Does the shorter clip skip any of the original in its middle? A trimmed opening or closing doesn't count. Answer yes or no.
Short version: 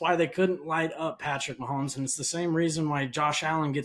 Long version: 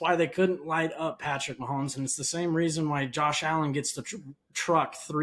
no